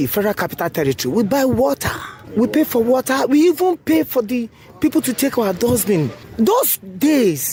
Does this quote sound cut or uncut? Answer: uncut